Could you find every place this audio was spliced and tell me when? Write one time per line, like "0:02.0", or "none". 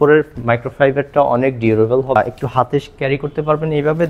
0:02.2

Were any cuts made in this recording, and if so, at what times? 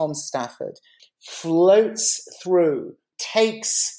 0:00.9
0:03.0

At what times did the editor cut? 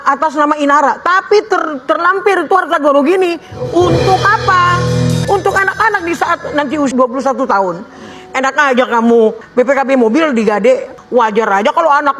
0:05.2
0:06.9
0:09.4
0:10.9

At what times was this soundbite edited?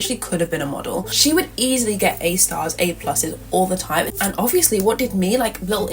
0:01.1
0:04.1

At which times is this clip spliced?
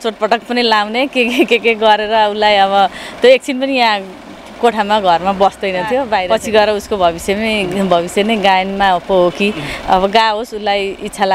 0:06.2

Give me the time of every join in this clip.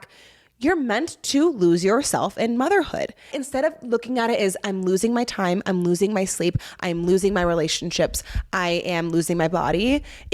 0:03.4

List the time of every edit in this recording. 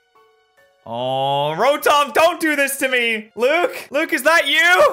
0:03.3
0:03.8

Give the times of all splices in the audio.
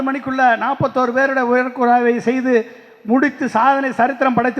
none

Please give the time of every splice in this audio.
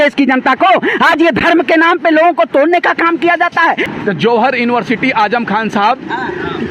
0:03.9

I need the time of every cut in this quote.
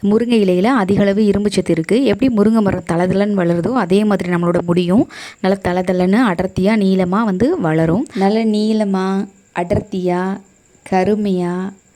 0:08.1

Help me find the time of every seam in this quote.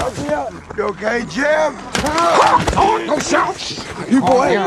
0:01.9

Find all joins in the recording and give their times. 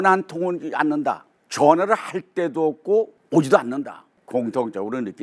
0:04.2

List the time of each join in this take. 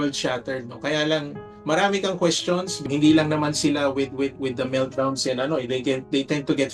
0:01.6
0:02.8

